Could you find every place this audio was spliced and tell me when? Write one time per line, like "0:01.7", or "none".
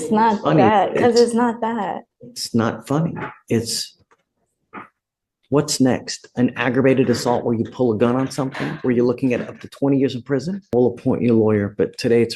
0:10.7